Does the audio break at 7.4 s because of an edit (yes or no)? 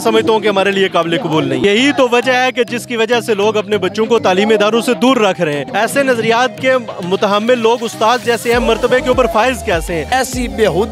no